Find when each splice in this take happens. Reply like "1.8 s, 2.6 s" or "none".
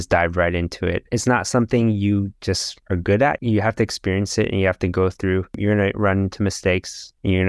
1.0 s, 3.4 s